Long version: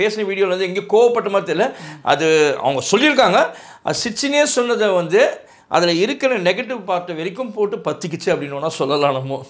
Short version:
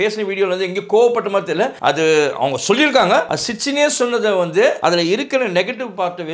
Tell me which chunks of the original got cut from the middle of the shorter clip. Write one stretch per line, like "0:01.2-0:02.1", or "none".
0:01.8-0:02.0
0:03.6-0:03.9
0:05.3-0:05.7